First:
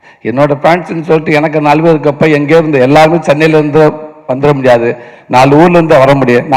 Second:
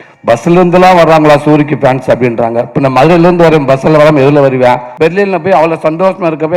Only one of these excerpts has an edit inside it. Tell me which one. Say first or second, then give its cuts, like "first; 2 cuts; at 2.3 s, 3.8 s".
second; 1 cut; at 4.9 s